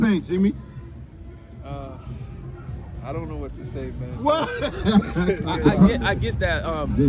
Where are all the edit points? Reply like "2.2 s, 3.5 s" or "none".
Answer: 5.5 s